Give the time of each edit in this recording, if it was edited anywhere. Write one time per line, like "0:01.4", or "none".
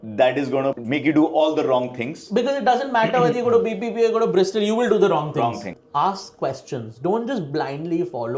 0:00.8
0:05.7